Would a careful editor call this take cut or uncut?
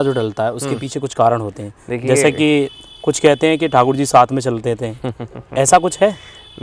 uncut